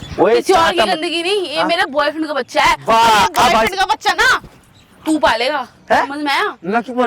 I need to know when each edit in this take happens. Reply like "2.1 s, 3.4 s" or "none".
none